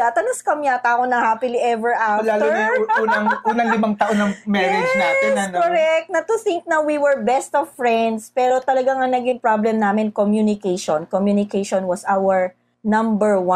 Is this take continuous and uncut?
no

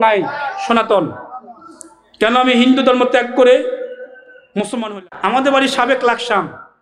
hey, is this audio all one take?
no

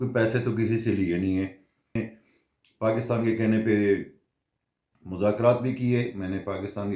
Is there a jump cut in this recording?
yes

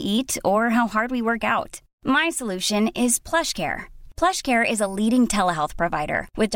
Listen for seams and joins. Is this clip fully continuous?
yes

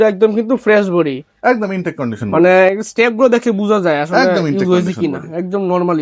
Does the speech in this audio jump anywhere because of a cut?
no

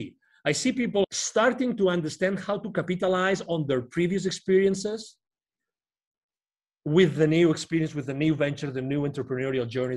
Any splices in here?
yes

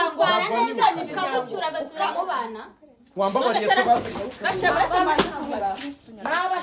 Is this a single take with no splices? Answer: yes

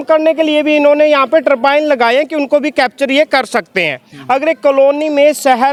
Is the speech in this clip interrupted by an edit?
no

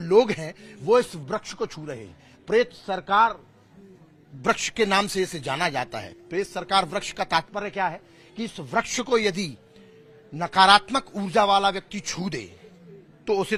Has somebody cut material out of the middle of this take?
no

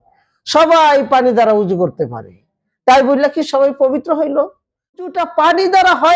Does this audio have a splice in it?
yes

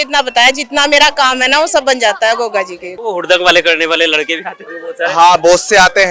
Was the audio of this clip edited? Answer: yes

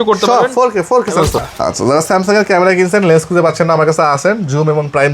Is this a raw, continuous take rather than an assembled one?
no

